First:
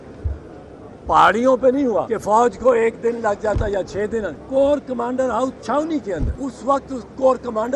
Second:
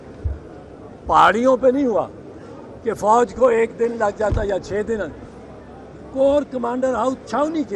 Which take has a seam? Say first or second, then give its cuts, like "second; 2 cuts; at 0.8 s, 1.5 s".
first; 3 cuts; at 2.0 s, 4.4 s, 6.3 s